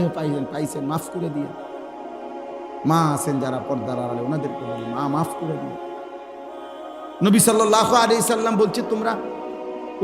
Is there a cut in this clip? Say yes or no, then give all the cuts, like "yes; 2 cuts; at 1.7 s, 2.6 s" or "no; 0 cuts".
yes; 2 cuts; at 1.5 s, 2.8 s